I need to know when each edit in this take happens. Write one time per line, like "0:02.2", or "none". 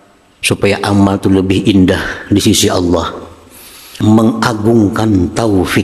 0:03.8